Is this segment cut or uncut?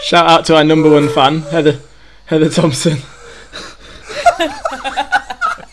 uncut